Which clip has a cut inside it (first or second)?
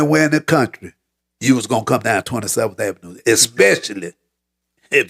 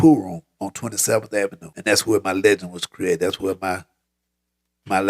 second